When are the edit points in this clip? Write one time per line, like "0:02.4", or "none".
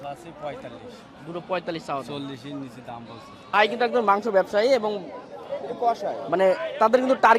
0:03.5